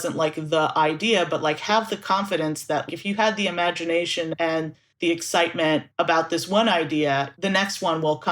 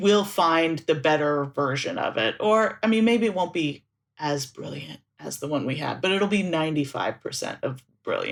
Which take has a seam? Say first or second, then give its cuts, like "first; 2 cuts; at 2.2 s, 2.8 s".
first; 4 cuts; at 2.9 s, 4.5 s, 5.9 s, 7.3 s